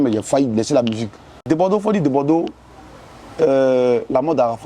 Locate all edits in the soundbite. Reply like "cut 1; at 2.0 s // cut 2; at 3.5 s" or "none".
cut 1; at 1.4 s